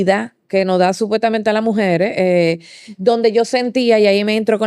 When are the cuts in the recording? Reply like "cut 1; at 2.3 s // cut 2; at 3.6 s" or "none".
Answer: none